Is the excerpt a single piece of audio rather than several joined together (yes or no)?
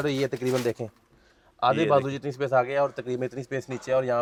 yes